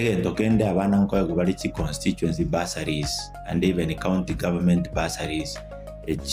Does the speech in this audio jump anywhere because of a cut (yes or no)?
no